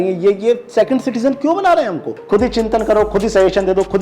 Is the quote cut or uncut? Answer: cut